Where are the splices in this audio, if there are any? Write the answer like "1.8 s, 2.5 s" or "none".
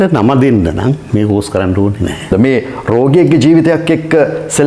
2.3 s